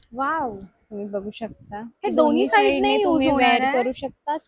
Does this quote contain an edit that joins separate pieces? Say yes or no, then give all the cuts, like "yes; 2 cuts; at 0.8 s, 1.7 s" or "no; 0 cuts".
no; 0 cuts